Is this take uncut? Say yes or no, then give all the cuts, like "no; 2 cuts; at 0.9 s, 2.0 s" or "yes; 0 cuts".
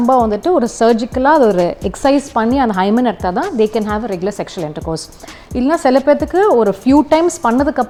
yes; 0 cuts